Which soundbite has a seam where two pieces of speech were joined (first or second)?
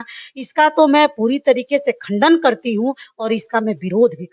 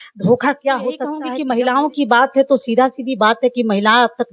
second